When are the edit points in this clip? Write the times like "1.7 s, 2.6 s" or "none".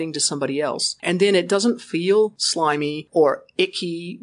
1.0 s, 2.6 s